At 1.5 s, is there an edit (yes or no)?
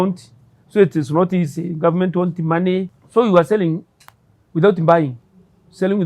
no